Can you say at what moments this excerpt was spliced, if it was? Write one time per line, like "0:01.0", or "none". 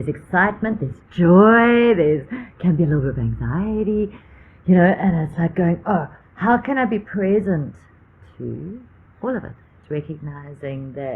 0:09.8